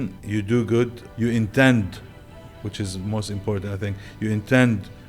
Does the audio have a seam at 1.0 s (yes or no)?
yes